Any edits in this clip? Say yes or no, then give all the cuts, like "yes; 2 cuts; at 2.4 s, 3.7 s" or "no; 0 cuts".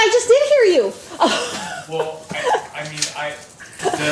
no; 0 cuts